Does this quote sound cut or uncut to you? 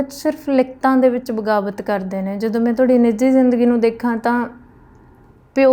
uncut